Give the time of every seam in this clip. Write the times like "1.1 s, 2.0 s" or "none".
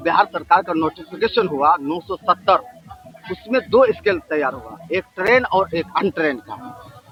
none